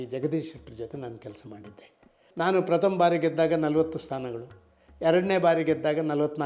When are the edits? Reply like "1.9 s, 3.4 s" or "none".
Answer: 2.2 s